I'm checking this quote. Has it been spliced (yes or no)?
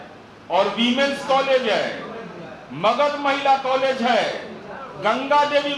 no